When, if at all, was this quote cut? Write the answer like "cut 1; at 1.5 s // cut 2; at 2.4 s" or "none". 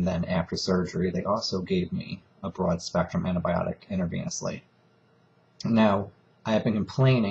cut 1; at 1.2 s

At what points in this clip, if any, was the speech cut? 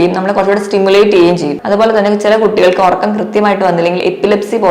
cut 1; at 1.5 s

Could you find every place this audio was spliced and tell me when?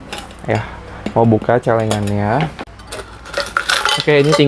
cut 1; at 2.6 s

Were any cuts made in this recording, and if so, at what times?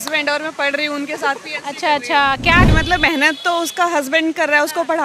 cut 1; at 2.7 s

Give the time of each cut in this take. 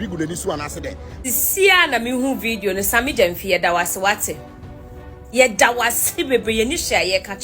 cut 1; at 1.1 s

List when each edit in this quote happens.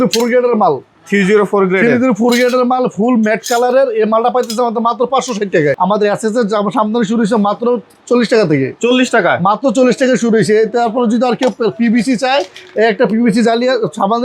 cut 1; at 5.8 s

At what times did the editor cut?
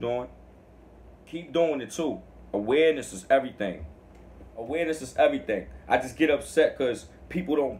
cut 1; at 1.5 s // cut 2; at 4.7 s

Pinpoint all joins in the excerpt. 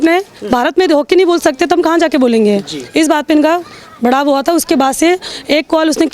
none

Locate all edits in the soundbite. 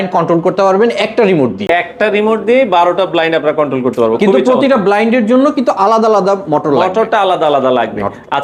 none

